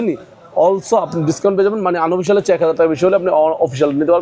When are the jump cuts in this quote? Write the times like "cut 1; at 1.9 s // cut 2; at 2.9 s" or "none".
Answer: none